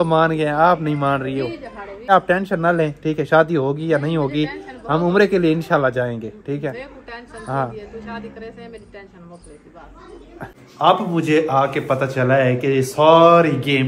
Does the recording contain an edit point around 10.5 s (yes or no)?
yes